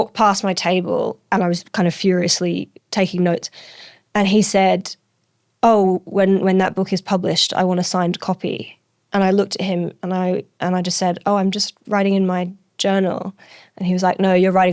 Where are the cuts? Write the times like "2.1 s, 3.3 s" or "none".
none